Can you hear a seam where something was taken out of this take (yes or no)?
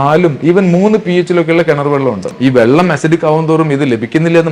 yes